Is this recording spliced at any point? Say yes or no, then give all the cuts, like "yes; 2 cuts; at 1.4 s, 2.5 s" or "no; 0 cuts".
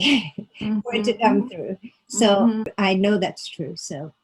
yes; 1 cut; at 2.7 s